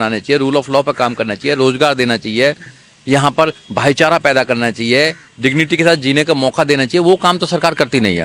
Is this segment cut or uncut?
uncut